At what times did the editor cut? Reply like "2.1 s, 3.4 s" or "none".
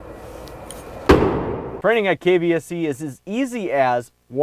1.7 s

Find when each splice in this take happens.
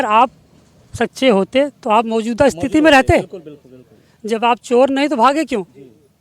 none

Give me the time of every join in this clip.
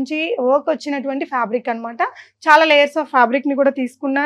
none

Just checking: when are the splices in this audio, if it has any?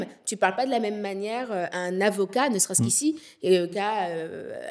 1.7 s, 3.7 s

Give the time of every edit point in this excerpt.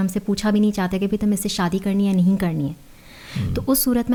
none

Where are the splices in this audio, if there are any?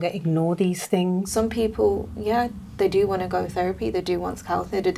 1.3 s

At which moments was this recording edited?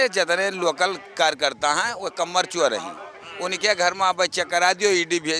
none

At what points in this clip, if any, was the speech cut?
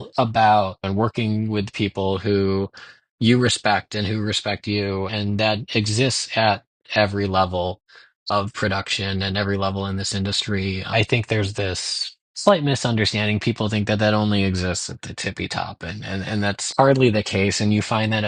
0.8 s, 5.1 s, 10.9 s, 16.7 s

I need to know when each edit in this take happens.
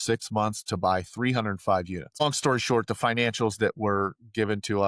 2.2 s

